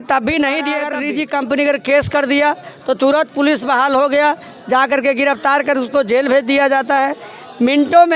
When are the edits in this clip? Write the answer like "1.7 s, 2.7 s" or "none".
0.9 s